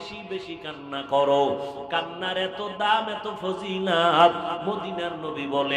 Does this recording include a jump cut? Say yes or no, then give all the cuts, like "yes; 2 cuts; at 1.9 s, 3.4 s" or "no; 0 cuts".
no; 0 cuts